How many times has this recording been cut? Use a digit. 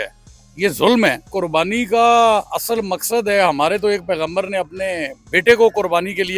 1